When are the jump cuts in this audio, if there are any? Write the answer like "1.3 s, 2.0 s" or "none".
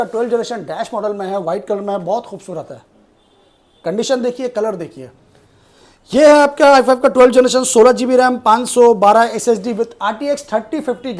none